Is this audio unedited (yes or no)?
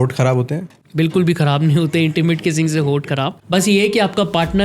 no